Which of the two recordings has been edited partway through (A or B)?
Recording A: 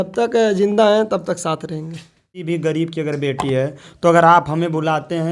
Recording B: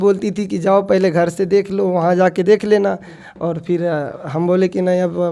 A